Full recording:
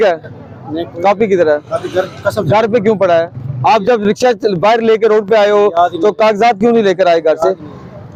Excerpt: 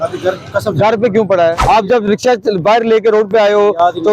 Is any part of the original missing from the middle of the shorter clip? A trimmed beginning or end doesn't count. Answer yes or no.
yes